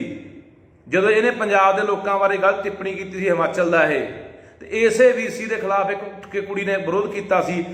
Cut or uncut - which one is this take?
uncut